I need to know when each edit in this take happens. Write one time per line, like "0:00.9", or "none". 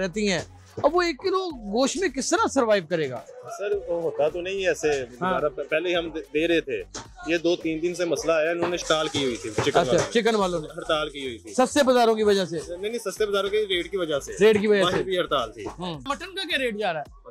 0:08.8
0:16.0